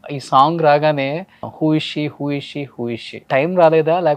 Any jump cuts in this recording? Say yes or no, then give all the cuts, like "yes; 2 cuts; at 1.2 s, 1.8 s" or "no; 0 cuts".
yes; 1 cut; at 3.3 s